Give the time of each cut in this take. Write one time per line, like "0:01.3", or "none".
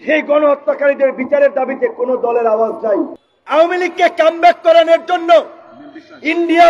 0:03.2